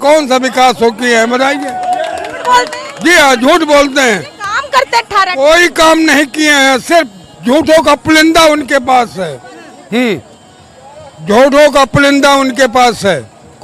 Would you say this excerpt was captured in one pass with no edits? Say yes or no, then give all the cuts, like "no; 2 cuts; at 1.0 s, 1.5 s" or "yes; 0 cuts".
yes; 0 cuts